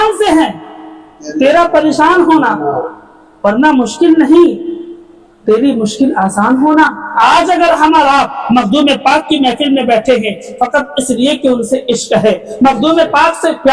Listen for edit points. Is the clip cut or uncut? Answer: cut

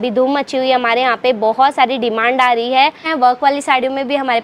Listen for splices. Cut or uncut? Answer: cut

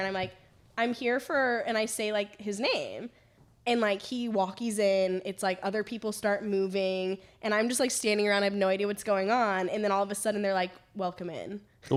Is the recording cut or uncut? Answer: uncut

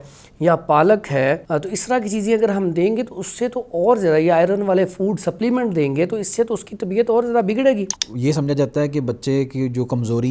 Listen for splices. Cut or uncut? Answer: cut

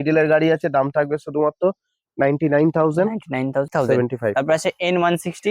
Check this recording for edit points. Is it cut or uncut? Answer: cut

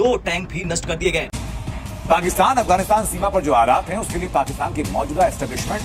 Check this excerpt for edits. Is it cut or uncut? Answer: cut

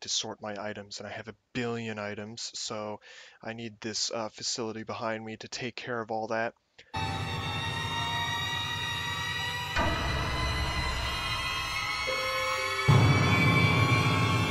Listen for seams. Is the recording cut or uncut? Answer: uncut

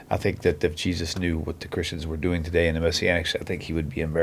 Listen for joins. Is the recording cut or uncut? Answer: uncut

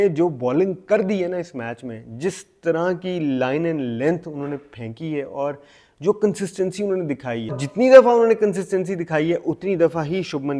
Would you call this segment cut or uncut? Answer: cut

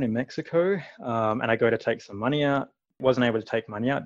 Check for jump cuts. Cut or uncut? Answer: cut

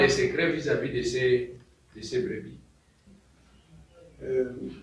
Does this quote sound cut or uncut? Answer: cut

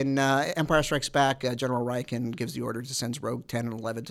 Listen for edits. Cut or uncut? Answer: uncut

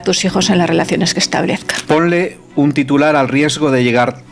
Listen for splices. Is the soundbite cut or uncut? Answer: cut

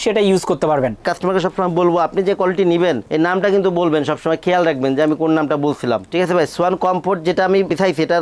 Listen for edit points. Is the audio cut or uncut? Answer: uncut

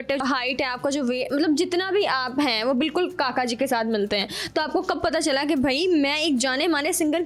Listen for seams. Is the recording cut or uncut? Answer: uncut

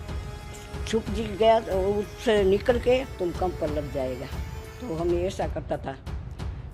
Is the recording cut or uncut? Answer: uncut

